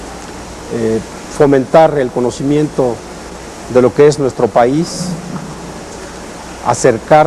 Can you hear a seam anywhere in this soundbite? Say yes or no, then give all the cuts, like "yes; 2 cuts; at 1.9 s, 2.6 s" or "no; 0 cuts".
yes; 1 cut; at 6.1 s